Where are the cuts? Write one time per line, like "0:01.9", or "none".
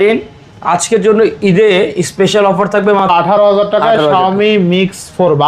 0:03.1